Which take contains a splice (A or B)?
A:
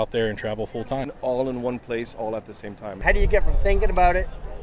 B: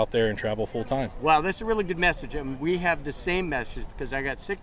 A